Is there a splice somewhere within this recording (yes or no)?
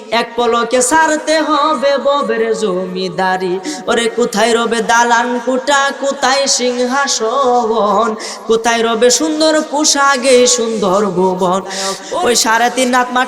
yes